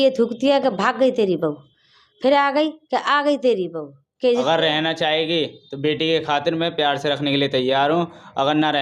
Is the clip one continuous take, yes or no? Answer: no